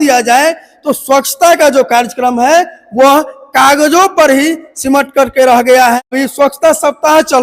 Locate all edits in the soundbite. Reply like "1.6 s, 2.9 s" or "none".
6.1 s